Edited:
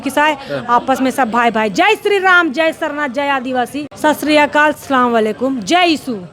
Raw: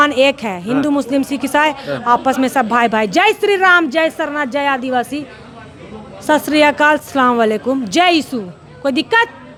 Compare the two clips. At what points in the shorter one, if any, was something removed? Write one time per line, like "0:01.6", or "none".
0:03.9